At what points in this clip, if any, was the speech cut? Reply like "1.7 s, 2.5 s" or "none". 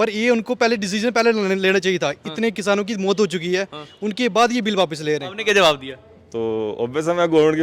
5.3 s